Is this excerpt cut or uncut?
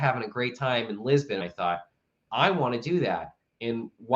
cut